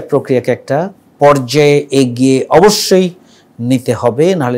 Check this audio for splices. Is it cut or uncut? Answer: cut